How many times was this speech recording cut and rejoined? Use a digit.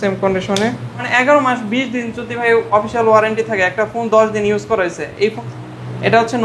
2